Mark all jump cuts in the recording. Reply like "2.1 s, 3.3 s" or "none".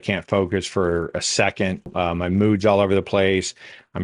1.9 s